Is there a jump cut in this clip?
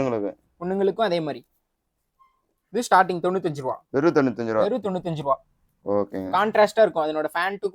no; 0 cuts

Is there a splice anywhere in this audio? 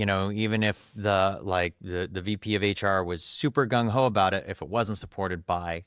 no; 0 cuts

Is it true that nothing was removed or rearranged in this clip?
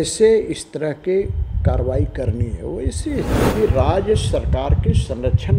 no; 1 cut; at 3.4 s

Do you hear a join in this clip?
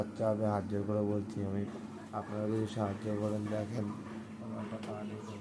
yes; 1 cut; at 1.7 s

